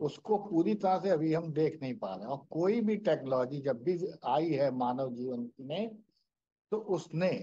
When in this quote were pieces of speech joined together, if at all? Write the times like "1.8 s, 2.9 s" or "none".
none